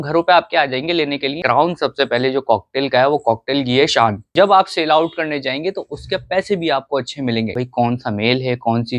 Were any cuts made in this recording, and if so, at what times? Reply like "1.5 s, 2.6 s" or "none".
1.4 s, 4.2 s, 7.6 s